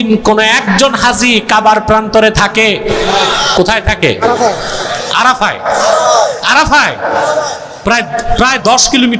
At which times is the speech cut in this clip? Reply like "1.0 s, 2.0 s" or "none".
none